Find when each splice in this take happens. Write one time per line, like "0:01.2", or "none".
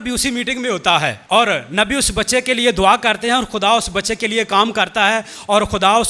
0:01.2